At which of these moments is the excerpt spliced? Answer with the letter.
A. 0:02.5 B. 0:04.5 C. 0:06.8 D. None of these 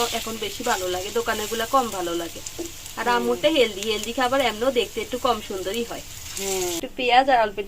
C